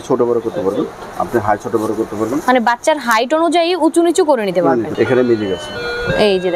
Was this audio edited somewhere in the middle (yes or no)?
yes